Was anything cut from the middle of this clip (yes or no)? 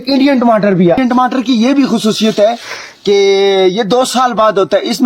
yes